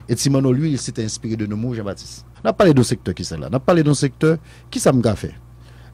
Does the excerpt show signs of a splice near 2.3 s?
yes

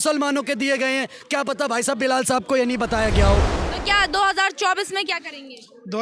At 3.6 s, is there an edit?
yes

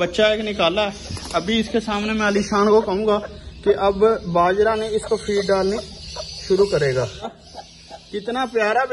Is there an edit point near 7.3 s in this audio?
yes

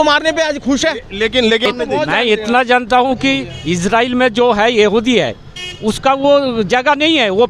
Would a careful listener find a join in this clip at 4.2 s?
no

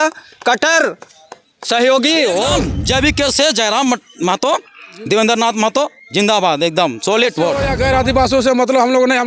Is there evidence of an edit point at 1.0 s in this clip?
no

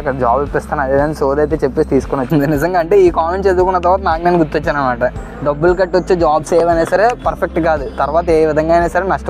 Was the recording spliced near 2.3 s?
yes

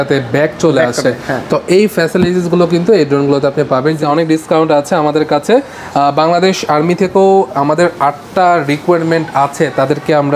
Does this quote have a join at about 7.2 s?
no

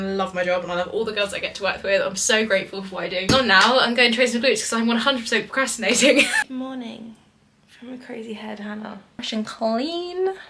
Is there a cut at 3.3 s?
yes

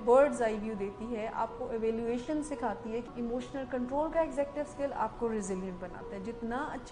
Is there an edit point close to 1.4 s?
no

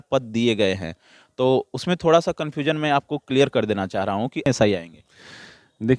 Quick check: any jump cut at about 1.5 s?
no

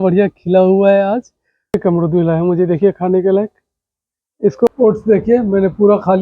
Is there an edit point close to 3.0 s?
no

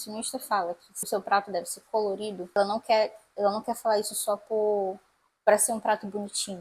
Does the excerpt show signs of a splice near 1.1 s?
yes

